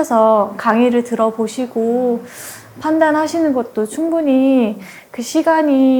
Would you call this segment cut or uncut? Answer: uncut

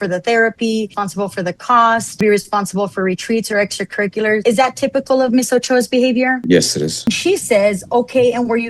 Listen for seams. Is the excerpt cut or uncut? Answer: cut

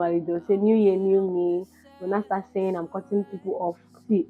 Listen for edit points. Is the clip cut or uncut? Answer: uncut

